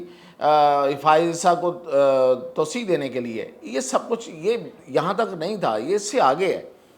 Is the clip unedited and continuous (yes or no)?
yes